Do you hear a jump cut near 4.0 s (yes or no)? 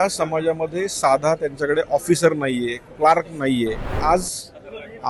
yes